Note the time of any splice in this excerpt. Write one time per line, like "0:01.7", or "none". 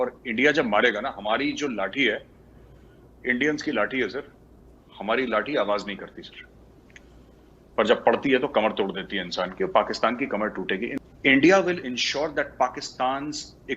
0:10.9